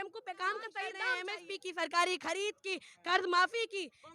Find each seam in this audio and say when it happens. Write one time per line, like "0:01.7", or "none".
0:01.1